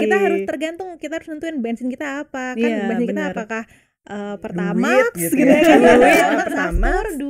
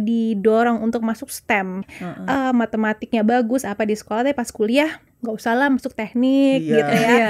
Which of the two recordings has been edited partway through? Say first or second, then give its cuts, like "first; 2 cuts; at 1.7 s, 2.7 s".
second; 2 cuts; at 2.0 s, 5.1 s